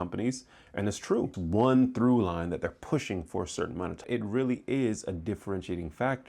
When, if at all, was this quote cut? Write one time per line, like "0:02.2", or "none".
0:01.4
0:04.0